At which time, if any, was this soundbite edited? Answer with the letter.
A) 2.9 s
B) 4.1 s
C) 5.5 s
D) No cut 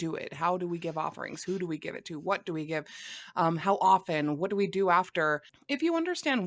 C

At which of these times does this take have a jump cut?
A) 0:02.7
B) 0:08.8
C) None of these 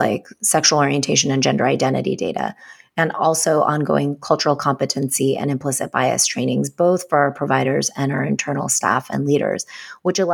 C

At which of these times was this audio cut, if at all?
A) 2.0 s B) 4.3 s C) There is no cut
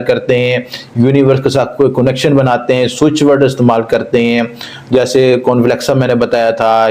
C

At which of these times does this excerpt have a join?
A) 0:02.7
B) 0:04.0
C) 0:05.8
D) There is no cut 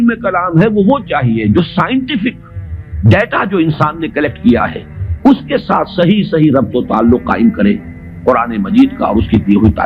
D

